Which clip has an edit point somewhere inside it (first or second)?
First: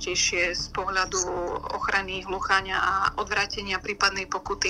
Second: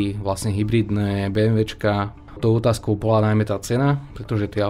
second